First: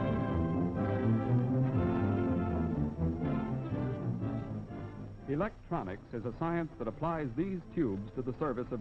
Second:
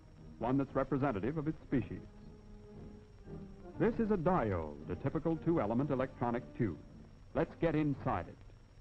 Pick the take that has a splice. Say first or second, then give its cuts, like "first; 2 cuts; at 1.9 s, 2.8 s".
first; 1 cut; at 1.2 s